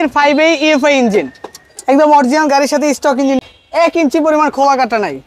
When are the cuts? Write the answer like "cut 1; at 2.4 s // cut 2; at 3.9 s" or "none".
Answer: none